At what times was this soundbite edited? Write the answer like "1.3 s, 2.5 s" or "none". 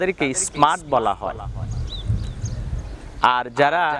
none